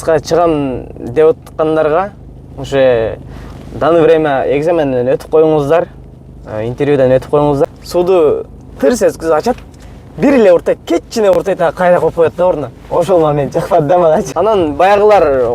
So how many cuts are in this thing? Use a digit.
2